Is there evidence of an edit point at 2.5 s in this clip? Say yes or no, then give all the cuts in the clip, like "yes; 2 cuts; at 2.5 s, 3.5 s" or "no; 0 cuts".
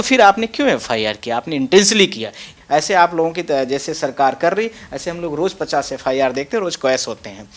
yes; 1 cut; at 2.5 s